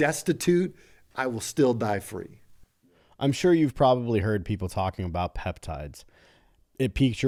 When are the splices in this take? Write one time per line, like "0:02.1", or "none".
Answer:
none